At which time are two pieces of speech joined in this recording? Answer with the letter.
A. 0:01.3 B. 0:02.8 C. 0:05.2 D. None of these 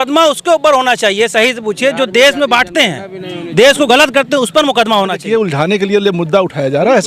C